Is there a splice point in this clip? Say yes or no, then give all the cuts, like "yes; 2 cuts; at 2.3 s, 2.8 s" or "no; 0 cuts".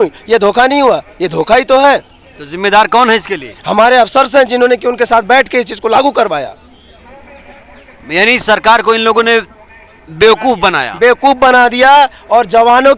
no; 0 cuts